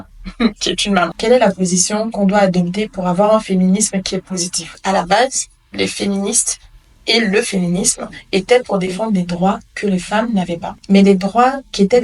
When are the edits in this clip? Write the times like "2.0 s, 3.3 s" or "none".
1.1 s, 4.8 s, 10.7 s